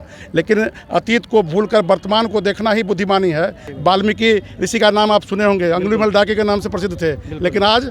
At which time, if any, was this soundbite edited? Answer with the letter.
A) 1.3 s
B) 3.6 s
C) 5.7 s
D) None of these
B